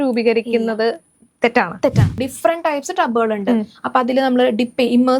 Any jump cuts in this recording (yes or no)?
yes